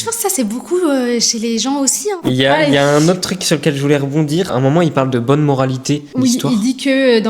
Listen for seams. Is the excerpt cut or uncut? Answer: cut